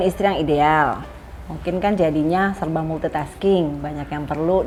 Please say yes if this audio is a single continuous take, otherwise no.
yes